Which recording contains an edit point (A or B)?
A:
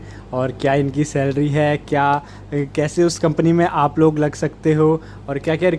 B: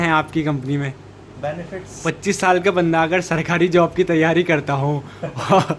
B